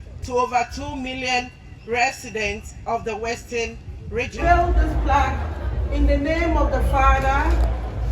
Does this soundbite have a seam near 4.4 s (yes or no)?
yes